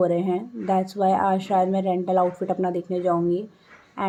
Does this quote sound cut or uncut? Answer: uncut